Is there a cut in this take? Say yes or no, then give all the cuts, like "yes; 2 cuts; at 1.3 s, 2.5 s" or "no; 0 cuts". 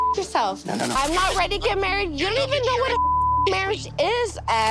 yes; 1 cut; at 0.9 s